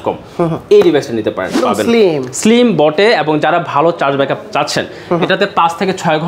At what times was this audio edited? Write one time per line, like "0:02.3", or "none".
0:01.6